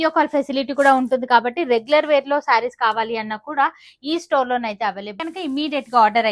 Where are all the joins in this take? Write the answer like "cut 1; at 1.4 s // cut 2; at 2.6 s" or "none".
cut 1; at 5.2 s